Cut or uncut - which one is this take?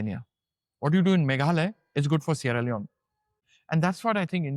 cut